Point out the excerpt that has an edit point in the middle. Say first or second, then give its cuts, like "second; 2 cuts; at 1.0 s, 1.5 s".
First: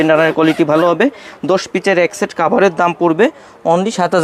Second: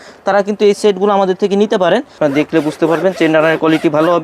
second; 1 cut; at 2.2 s